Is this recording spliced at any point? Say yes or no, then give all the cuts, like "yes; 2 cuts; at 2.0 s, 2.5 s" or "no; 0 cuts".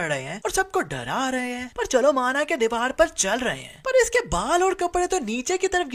no; 0 cuts